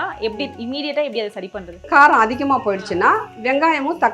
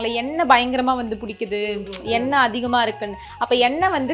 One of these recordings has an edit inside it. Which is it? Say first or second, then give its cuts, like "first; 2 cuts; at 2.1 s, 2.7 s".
first; 1 cut; at 1.8 s